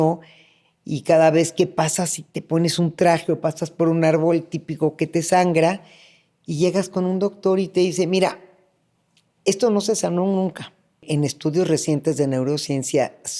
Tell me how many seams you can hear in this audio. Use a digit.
1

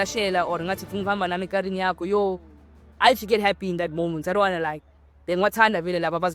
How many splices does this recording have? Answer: 0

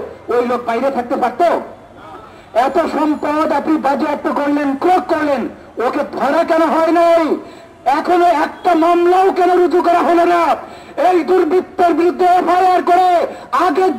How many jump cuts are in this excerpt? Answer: 0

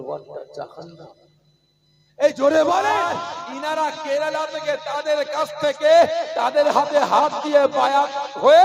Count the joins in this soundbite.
1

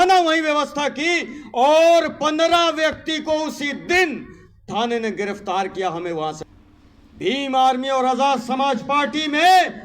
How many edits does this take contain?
1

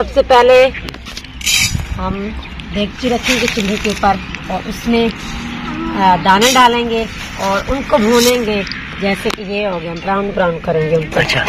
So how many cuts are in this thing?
0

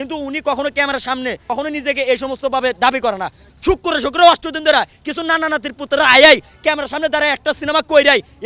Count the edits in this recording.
2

